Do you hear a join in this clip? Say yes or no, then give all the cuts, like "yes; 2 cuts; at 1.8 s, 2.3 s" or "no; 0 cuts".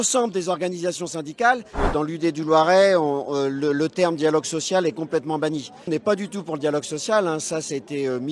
yes; 2 cuts; at 1.8 s, 5.9 s